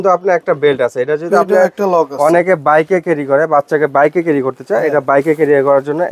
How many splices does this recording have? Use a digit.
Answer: 0